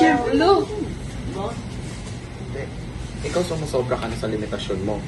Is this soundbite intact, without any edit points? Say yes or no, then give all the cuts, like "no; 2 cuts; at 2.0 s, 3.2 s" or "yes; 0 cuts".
yes; 0 cuts